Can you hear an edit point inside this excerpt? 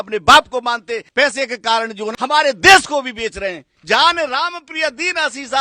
yes; 3 cuts; at 1.1 s, 2.1 s, 3.7 s

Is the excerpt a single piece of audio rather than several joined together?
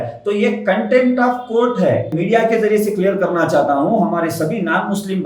no; 1 cut; at 2.1 s

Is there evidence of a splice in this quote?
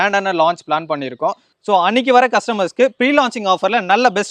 yes; 1 cut; at 1.6 s

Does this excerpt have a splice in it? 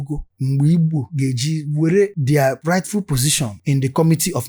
no; 0 cuts

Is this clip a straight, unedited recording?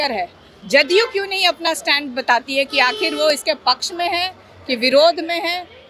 yes; 0 cuts

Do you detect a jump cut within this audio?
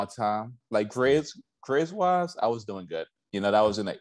no; 0 cuts

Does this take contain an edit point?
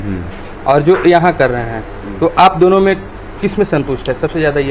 no; 0 cuts

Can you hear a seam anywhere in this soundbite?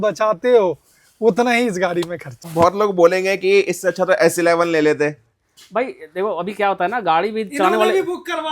yes; 1 cut; at 2.3 s

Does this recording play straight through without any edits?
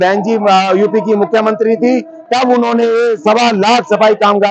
yes; 0 cuts

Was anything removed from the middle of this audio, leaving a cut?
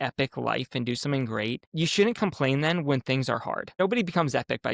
yes; 2 cuts; at 1.7 s, 3.8 s

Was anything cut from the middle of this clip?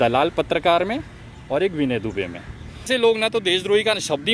yes; 1 cut; at 2.9 s

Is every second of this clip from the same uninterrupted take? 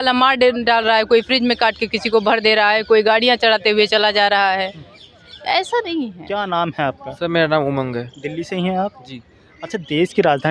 yes; 0 cuts

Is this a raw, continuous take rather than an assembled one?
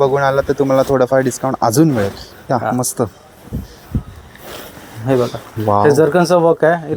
yes; 0 cuts

